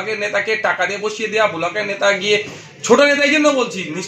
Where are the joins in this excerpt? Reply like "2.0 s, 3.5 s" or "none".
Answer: none